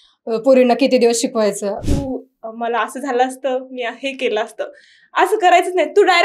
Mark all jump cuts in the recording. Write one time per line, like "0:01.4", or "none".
0:01.8